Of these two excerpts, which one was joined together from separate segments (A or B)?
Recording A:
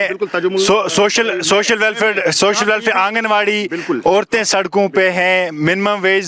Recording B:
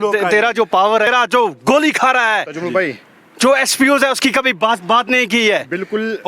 B